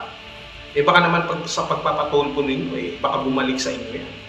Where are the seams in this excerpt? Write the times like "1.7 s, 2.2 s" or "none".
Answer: none